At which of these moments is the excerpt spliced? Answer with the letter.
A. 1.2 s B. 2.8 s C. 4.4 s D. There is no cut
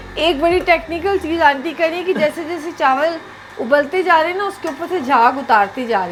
D